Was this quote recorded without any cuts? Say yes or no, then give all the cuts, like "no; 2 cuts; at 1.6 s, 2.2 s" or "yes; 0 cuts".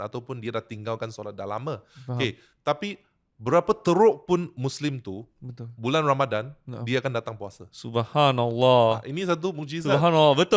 yes; 0 cuts